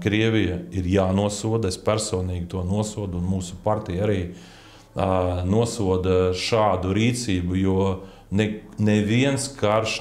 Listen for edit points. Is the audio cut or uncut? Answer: uncut